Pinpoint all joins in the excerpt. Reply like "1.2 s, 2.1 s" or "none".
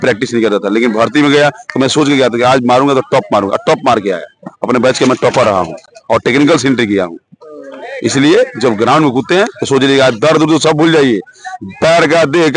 none